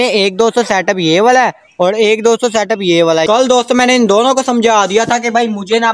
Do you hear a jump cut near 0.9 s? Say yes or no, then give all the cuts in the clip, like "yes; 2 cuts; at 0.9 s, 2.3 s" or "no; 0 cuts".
no; 1 cut; at 3.2 s